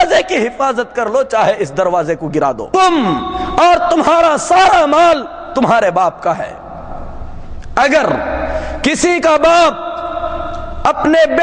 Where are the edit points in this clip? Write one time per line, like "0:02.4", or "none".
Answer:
0:02.6